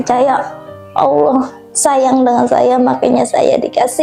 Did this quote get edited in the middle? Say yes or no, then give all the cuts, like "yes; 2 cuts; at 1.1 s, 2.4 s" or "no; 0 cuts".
no; 0 cuts